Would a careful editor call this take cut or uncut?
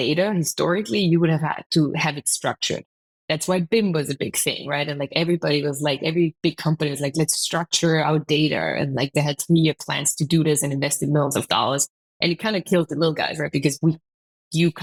uncut